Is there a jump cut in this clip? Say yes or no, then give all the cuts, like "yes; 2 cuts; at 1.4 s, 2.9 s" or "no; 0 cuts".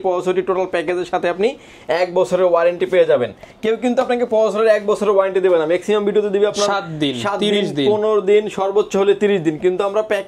no; 0 cuts